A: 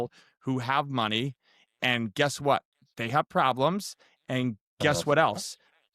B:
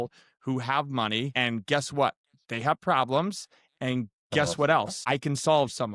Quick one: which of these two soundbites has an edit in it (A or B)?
B